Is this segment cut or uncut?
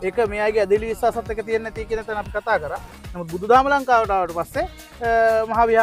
uncut